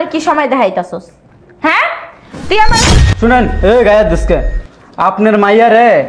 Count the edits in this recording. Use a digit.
1